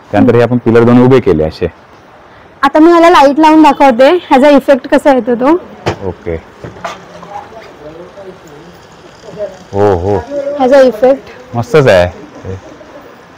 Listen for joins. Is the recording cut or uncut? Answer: uncut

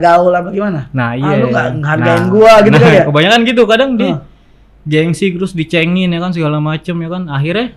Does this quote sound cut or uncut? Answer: uncut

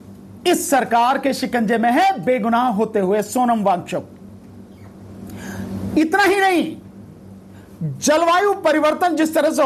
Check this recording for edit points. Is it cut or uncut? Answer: uncut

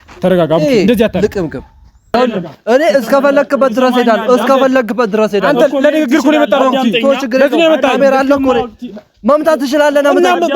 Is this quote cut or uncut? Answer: cut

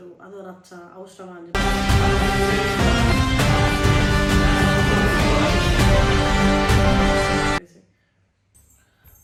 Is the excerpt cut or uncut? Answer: uncut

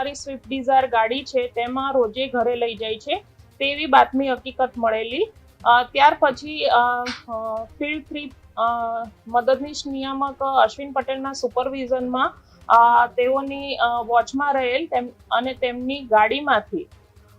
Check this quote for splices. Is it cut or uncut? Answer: uncut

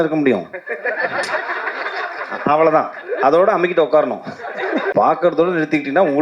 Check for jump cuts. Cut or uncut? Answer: cut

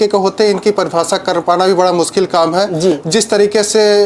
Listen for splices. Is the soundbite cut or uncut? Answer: uncut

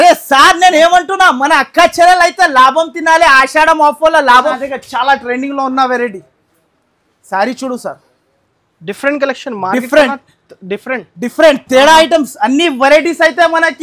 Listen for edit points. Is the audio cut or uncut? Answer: cut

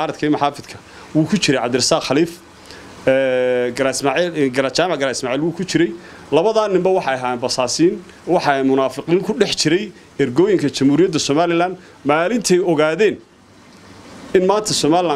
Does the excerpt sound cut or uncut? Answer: uncut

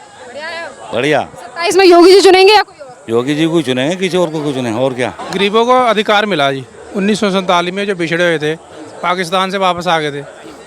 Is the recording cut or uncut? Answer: cut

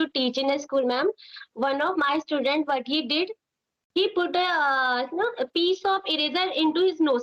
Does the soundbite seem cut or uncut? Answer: uncut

